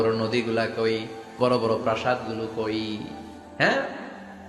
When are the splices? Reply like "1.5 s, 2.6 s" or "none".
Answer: 1.3 s